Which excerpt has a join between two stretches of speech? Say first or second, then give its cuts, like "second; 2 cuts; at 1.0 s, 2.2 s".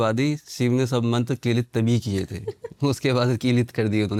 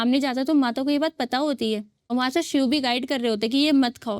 second; 1 cut; at 2.0 s